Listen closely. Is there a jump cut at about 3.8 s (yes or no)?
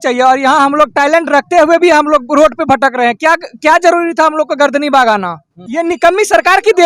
no